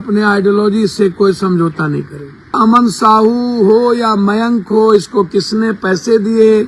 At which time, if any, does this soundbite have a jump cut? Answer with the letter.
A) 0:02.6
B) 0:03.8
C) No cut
A